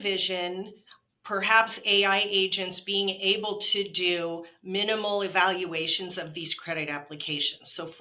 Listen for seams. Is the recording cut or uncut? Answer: uncut